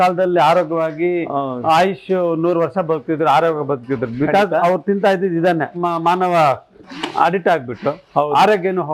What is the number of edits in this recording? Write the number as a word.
one